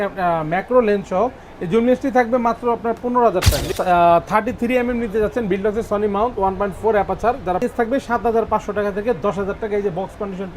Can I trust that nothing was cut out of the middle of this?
no; 2 cuts; at 3.8 s, 7.6 s

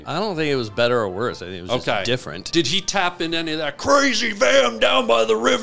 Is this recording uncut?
no; 1 cut; at 2.5 s

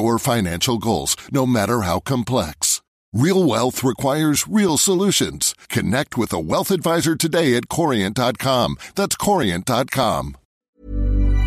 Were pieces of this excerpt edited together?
yes; 1 cut; at 10.5 s

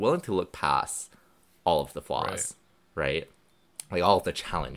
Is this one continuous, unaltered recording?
yes; 0 cuts

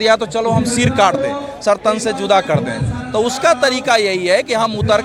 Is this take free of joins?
yes; 0 cuts

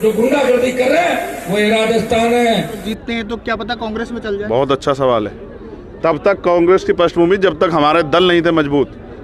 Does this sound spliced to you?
yes; 1 cut; at 3.1 s

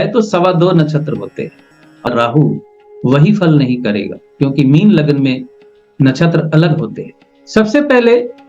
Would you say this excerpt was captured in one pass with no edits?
no; 1 cut; at 1.9 s

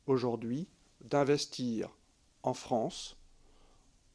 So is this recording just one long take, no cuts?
yes; 0 cuts

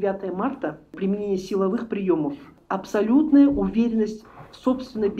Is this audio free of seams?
no; 2 cuts; at 0.9 s, 2.6 s

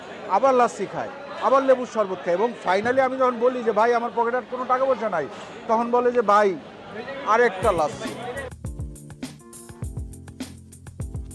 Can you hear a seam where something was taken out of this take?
yes; 1 cut; at 8.7 s

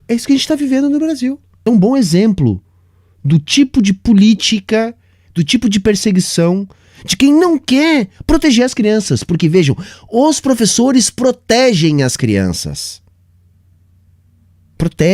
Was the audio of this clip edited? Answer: yes; 1 cut; at 1.6 s

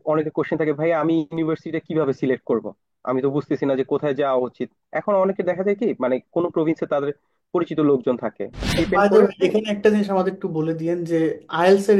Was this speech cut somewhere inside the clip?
yes; 1 cut; at 8.6 s

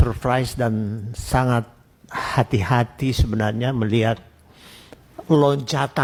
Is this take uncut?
yes; 0 cuts

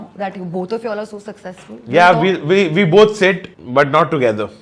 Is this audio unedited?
no; 1 cut; at 3.5 s

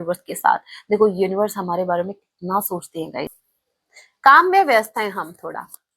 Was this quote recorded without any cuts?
no; 1 cut; at 3.5 s

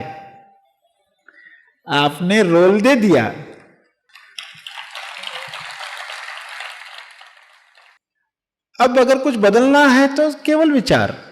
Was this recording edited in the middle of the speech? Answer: yes; 1 cut; at 8.0 s

